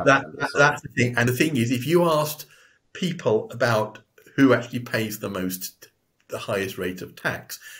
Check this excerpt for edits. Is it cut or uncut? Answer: cut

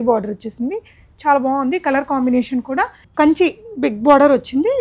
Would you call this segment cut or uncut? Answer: cut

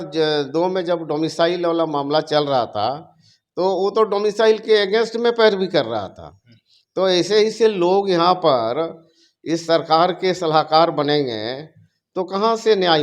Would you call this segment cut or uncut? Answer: uncut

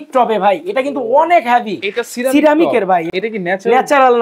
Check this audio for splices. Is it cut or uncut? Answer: cut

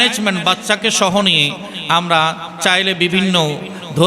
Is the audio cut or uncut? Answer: uncut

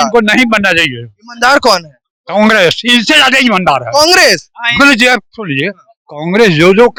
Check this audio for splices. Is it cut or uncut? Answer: uncut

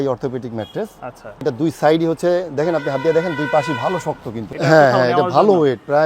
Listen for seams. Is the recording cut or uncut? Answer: cut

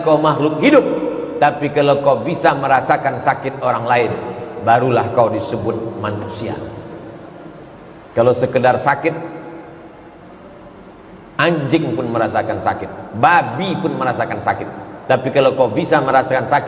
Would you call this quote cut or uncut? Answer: uncut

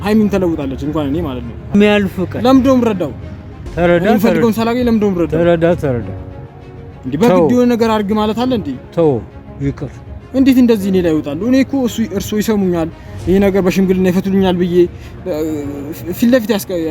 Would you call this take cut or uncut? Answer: cut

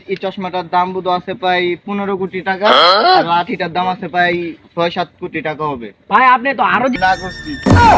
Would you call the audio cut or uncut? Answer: cut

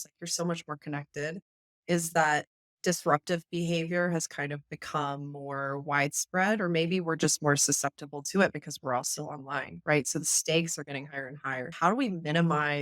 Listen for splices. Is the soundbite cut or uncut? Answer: cut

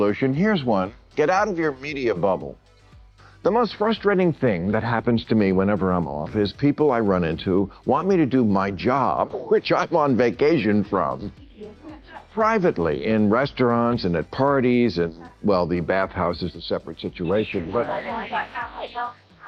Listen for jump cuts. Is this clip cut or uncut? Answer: uncut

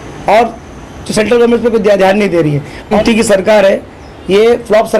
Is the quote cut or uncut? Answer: cut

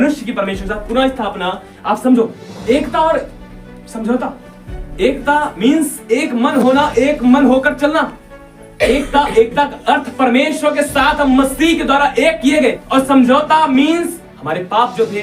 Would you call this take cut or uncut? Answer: cut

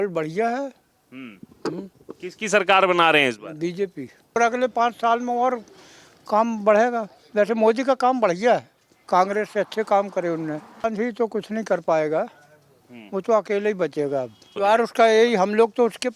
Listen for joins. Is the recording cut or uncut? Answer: cut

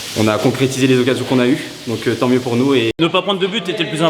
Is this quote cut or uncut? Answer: cut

